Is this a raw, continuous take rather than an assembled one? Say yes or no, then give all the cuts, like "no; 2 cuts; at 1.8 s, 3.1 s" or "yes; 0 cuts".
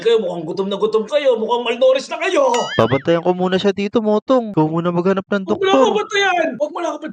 no; 1 cut; at 2.7 s